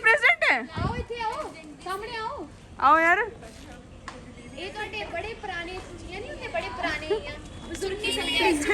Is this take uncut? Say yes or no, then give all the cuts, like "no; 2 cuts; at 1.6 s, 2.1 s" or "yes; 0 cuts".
yes; 0 cuts